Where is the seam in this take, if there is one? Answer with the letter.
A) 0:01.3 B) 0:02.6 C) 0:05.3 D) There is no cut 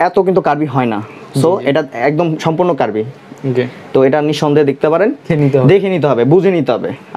C